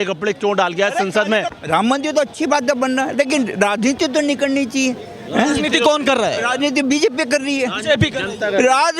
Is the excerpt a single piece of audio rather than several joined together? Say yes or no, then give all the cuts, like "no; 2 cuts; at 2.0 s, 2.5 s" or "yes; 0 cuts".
no; 1 cut; at 1.5 s